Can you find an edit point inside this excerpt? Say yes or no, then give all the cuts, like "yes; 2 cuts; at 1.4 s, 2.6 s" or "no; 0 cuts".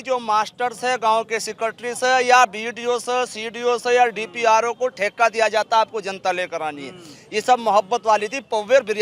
no; 0 cuts